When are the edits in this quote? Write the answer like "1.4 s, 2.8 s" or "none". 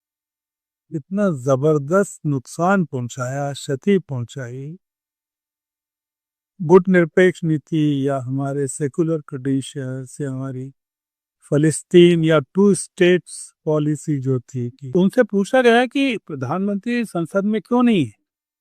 14.8 s

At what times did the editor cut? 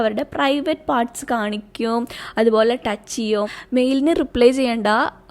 3.6 s

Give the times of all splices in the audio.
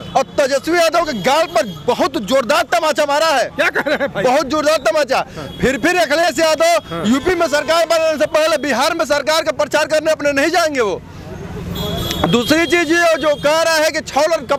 none

